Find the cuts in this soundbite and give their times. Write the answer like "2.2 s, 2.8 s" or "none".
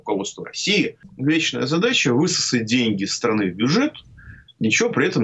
1.0 s